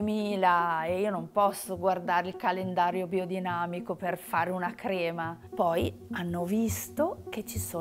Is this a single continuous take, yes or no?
no